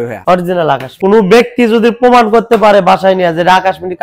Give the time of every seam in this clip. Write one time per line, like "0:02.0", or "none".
0:00.9